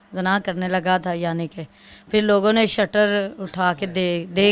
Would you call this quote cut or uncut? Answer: uncut